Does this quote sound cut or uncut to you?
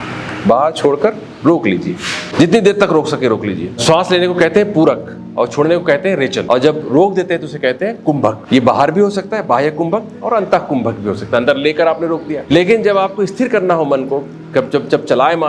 cut